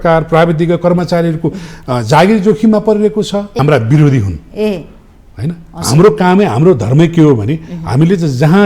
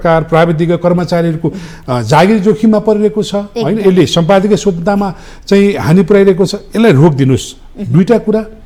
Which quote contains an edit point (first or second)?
first